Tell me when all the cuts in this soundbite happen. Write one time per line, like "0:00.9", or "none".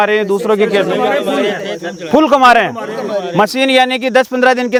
none